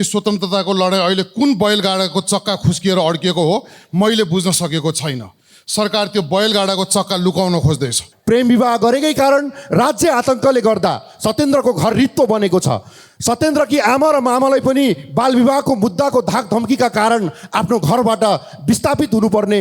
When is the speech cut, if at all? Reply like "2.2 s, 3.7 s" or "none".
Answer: 8.1 s